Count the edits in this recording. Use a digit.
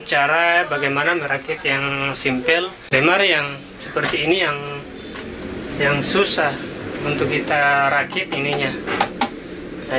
1